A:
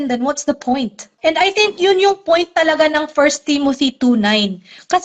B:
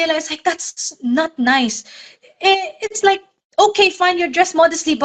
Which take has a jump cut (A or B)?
A